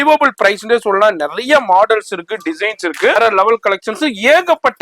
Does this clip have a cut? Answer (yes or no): yes